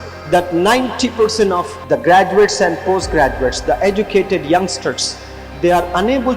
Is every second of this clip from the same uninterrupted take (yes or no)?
no